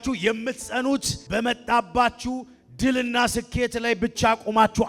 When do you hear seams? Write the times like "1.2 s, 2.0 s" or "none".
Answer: 1.2 s